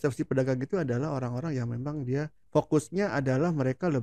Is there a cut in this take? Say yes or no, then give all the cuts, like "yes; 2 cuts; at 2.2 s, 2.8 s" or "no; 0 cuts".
yes; 1 cut; at 2.4 s